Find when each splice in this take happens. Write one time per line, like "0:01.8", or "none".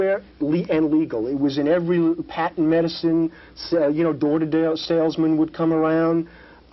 none